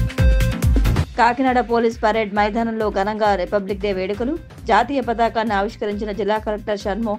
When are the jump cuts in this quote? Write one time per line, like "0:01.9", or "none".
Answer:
0:01.0